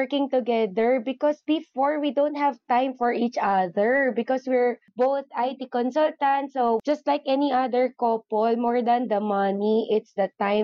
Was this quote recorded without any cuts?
yes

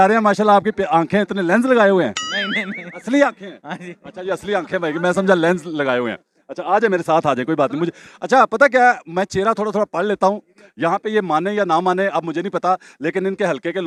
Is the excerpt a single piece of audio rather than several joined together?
yes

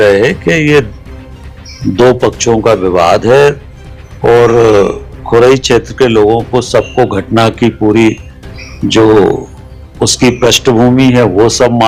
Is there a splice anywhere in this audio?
no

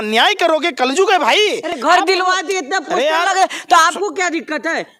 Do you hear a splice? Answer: no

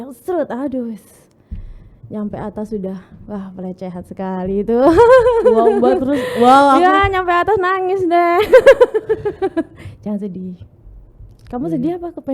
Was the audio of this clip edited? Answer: no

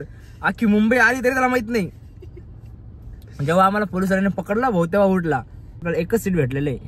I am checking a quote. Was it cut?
yes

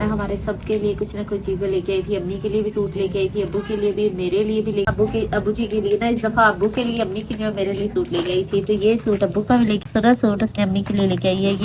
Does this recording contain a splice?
yes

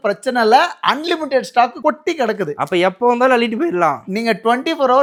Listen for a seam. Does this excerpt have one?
no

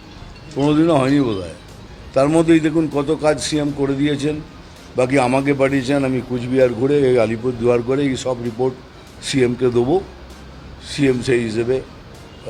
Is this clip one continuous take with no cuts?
yes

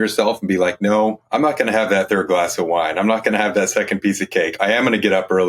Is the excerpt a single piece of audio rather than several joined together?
no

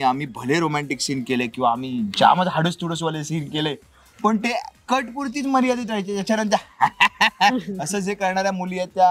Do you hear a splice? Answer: no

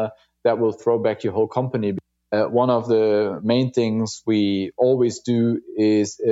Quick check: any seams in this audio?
yes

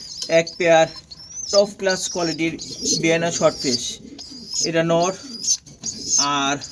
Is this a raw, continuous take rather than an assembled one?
yes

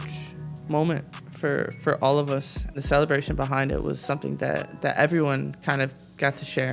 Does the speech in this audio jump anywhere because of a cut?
no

